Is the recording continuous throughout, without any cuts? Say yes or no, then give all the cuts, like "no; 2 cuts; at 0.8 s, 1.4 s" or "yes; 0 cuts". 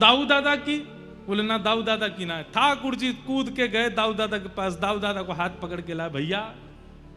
yes; 0 cuts